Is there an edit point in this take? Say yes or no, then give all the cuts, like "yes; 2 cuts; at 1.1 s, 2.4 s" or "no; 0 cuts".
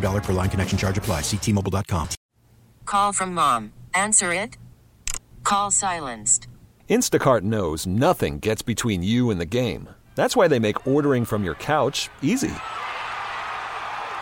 yes; 1 cut; at 2.3 s